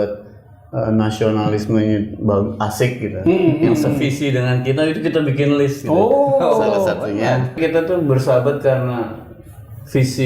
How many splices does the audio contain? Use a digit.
1